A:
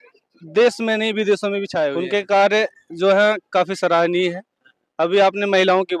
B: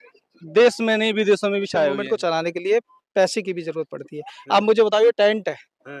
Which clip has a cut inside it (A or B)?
B